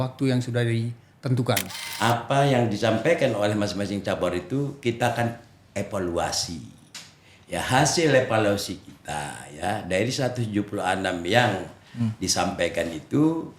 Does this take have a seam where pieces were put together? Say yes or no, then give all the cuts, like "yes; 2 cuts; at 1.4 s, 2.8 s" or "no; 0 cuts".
yes; 1 cut; at 1.8 s